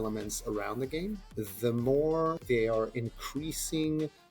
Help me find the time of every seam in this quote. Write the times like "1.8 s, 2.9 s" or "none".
1.2 s, 2.4 s